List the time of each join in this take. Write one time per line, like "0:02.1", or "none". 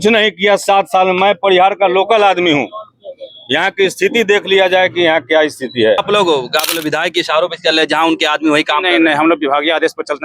0:06.0